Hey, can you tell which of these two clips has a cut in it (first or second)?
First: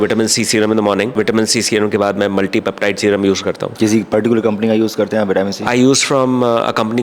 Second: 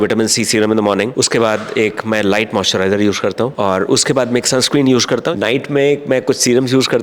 second